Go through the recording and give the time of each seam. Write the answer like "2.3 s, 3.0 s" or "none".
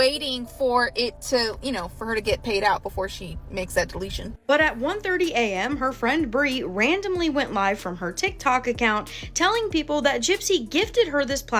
4.4 s